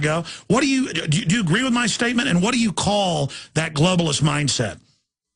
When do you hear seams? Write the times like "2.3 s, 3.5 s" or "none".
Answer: 1.9 s